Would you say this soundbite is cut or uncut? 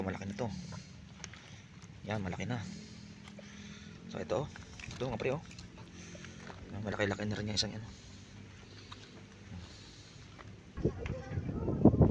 cut